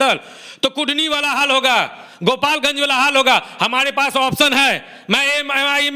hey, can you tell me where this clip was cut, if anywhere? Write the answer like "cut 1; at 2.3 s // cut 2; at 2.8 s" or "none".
none